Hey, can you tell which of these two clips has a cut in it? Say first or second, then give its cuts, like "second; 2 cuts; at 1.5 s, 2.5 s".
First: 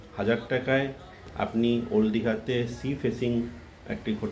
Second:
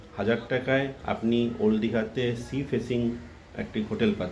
second; 1 cut; at 1.0 s